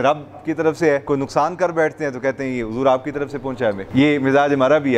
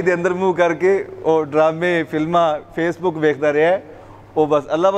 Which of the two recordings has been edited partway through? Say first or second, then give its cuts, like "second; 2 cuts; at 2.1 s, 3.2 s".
first; 2 cuts; at 1.0 s, 3.8 s